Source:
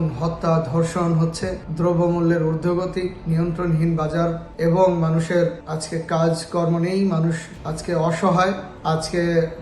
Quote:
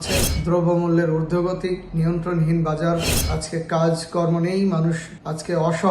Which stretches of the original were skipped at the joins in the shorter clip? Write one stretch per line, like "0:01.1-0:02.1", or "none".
0:04.5-0:05.6